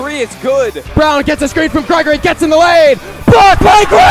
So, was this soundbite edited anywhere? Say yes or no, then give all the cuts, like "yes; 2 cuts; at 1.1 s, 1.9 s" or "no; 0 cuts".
no; 0 cuts